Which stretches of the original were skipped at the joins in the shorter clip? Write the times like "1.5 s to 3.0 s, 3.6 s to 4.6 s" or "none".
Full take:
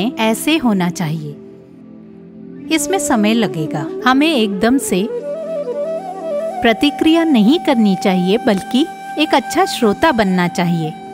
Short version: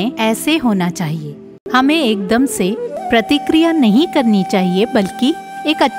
1.6 s to 3.9 s, 5.3 s to 6.5 s